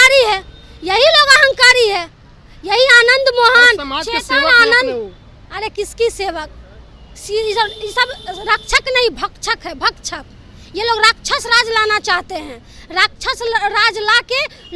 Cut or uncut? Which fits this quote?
uncut